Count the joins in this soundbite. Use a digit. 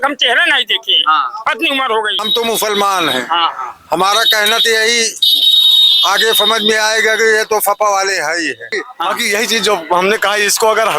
2